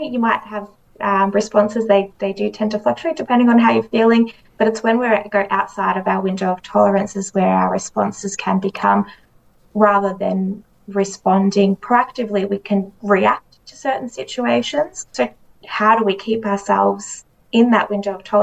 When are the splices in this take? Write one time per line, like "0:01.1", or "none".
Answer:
0:15.0

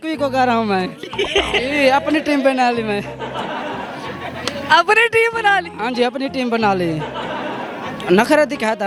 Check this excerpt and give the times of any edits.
none

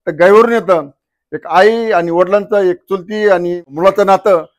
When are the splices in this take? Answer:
0:03.7

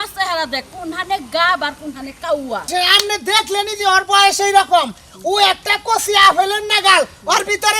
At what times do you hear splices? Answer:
0:02.7

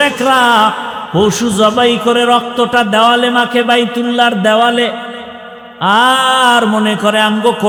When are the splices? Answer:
none

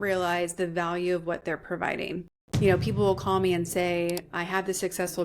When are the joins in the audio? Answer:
0:02.7

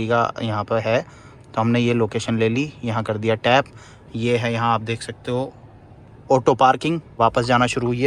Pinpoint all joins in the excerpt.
0:07.1

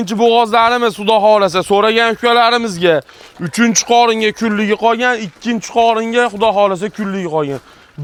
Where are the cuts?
none

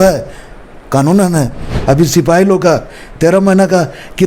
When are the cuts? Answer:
0:01.7

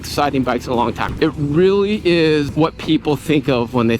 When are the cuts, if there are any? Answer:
0:01.0
0:02.5

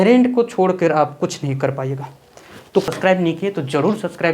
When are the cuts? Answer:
0:02.9

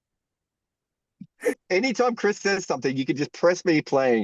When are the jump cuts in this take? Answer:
0:01.6

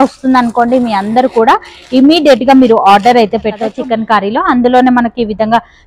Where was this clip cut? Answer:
0:03.6

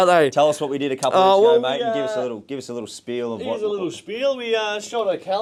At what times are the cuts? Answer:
none

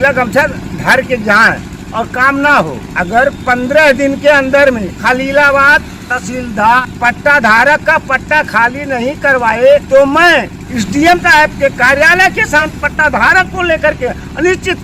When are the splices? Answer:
0:01.7
0:02.8
0:04.9
0:06.8
0:09.8
0:10.6
0:12.7

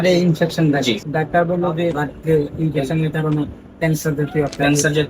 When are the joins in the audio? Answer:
0:01.0
0:02.0

